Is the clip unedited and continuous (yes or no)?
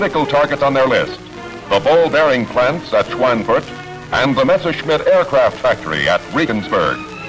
no